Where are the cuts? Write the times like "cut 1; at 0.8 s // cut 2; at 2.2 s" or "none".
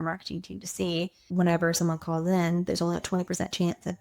cut 1; at 1.2 s